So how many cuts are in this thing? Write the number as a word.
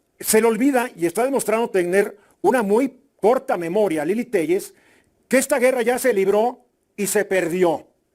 zero